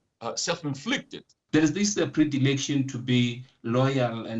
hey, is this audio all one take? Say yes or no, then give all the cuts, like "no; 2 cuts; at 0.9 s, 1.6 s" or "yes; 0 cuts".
no; 1 cut; at 1.3 s